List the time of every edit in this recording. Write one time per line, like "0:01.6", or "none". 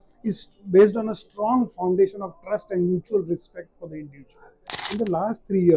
0:04.8